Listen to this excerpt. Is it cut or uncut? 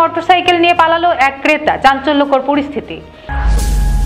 uncut